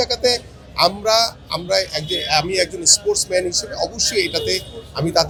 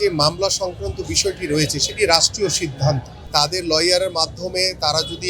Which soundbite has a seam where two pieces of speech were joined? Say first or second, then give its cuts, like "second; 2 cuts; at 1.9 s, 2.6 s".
second; 1 cut; at 3.3 s